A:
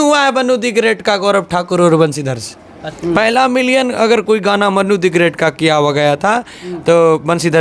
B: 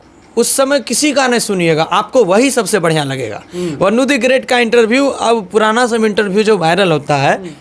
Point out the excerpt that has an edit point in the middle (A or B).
A